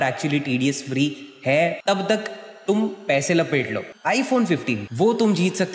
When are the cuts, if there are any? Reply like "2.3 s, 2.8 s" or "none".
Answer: 3.9 s, 4.8 s